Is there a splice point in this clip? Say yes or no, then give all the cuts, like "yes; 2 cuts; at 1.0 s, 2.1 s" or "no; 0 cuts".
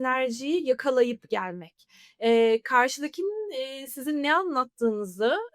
no; 0 cuts